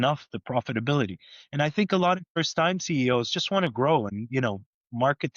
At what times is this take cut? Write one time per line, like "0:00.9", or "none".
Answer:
0:02.4
0:04.1